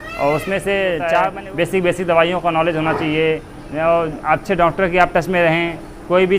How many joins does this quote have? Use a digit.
1